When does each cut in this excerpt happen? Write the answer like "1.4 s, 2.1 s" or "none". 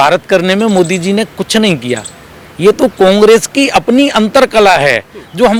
none